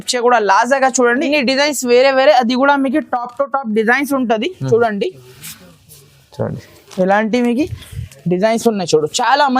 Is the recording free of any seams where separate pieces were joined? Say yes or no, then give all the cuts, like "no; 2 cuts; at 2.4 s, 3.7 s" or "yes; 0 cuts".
no; 1 cut; at 1.2 s